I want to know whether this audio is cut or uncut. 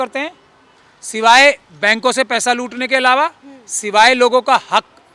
uncut